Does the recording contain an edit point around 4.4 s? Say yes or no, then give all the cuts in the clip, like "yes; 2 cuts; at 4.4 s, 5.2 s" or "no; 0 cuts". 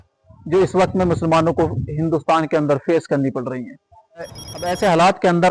yes; 1 cut; at 4.4 s